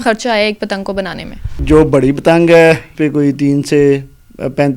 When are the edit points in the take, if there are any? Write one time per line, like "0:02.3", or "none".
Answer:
0:01.6
0:02.9